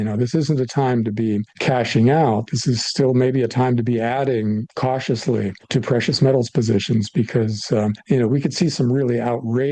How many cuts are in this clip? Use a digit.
4